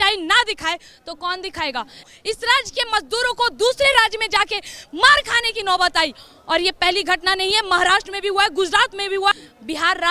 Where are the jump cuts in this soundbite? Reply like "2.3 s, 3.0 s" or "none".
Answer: 2.1 s, 9.3 s